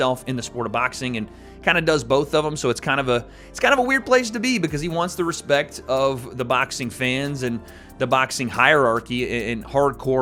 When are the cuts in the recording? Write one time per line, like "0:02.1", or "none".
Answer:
none